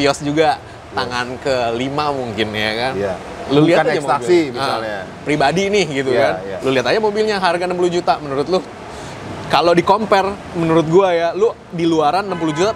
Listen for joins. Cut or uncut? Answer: uncut